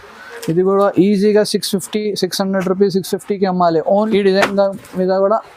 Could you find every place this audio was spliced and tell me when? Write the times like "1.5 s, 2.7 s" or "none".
4.1 s

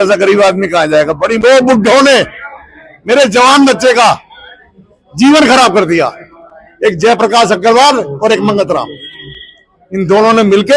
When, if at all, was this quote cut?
1.4 s

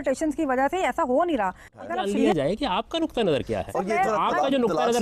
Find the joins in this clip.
1.9 s

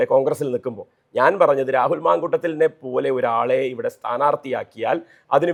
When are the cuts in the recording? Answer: none

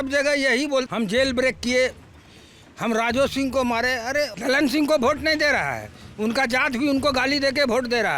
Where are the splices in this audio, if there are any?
0.9 s, 4.3 s

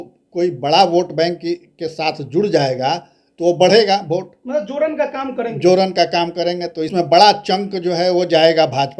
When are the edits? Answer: 6.9 s

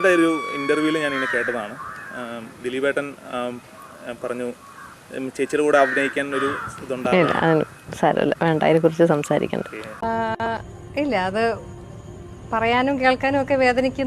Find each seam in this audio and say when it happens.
9.8 s

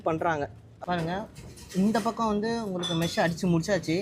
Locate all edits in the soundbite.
1.0 s

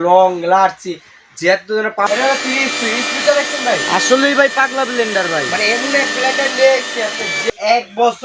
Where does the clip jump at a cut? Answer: 2.1 s, 7.5 s

